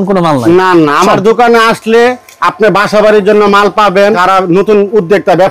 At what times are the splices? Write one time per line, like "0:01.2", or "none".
0:04.2